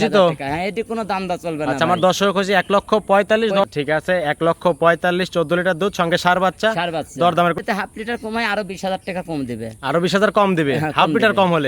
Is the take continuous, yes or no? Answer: no